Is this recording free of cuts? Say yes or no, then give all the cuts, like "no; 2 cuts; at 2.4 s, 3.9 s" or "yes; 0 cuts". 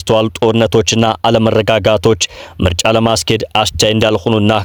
yes; 0 cuts